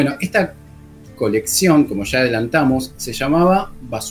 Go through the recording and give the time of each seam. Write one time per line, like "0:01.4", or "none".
none